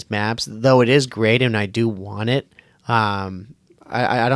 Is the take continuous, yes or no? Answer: yes